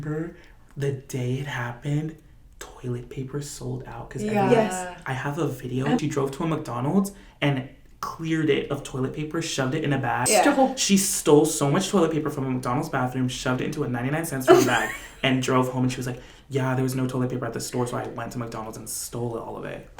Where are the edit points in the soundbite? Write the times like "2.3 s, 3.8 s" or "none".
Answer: 6.0 s, 10.3 s